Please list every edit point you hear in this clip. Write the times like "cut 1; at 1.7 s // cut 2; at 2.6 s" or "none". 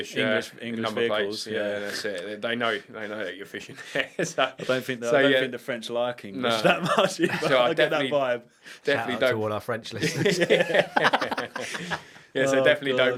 none